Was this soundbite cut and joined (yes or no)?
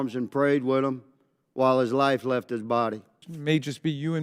yes